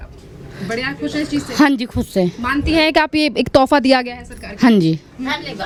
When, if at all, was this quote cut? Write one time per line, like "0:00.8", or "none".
none